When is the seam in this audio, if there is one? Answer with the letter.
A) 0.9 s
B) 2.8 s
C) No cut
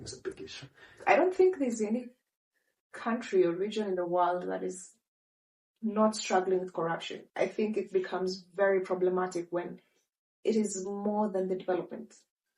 A